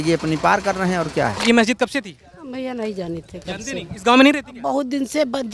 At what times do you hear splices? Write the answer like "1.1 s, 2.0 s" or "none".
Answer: 1.4 s